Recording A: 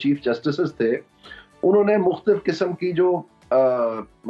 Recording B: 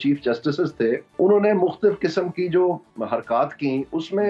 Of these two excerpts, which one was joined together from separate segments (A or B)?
B